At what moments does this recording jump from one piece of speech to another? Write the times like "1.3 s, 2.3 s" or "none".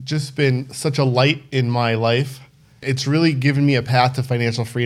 2.9 s

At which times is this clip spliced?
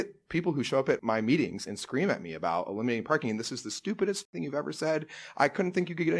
1.0 s

